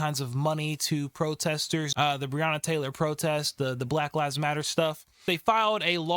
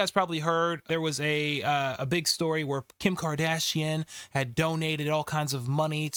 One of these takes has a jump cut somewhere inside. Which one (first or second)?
first